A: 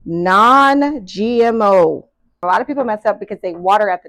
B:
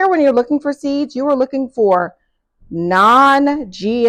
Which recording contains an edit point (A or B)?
A